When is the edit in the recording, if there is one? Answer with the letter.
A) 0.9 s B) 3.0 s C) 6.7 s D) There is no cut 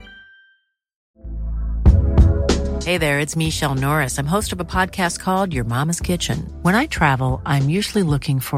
A